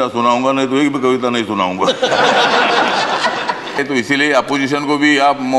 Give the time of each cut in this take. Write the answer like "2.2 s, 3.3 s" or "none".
3.8 s